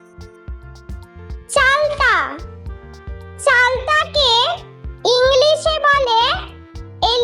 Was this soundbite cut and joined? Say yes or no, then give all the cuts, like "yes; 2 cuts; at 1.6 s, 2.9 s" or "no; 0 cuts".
yes; 1 cut; at 1.5 s